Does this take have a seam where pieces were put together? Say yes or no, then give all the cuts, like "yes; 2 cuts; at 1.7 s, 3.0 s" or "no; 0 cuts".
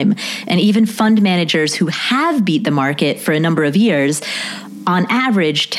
no; 0 cuts